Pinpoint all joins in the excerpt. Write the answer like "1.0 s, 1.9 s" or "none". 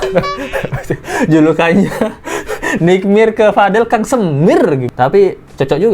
4.9 s